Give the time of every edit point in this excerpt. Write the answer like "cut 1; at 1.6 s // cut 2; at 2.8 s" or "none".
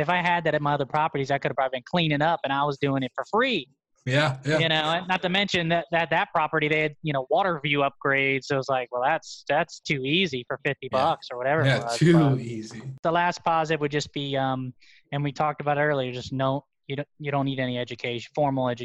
cut 1; at 12.9 s